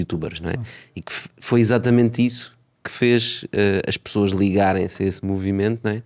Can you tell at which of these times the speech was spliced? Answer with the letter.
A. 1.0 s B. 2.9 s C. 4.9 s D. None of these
D